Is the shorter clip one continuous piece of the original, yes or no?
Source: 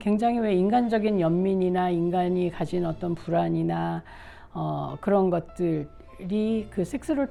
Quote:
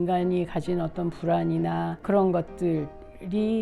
no